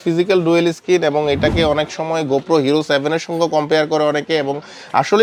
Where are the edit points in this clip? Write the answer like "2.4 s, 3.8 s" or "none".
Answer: none

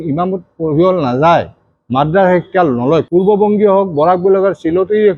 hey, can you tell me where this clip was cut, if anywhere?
3.1 s

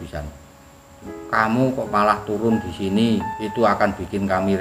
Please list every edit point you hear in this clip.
3.4 s

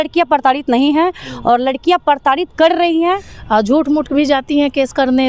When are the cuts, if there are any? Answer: 3.3 s

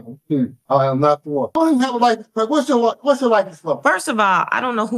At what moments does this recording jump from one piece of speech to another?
1.5 s

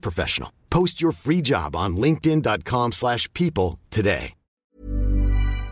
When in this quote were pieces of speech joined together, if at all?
4.6 s

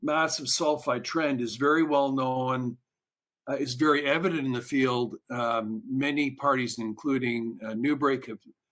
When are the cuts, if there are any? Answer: none

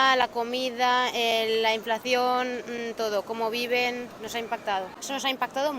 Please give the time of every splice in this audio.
4.9 s

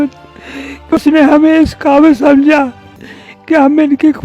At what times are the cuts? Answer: 0.9 s

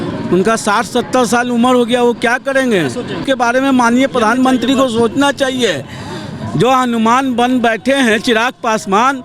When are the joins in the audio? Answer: 3.2 s

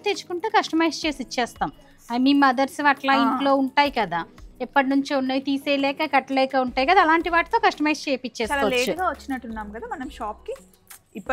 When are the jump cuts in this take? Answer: none

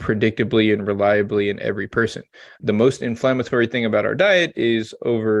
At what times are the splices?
none

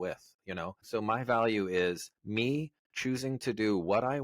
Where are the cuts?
0.8 s, 2.1 s

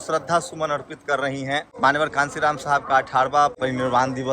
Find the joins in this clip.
1.7 s, 3.6 s

